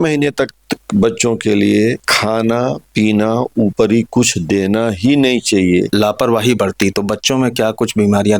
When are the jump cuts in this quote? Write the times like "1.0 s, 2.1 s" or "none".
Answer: 2.1 s, 5.9 s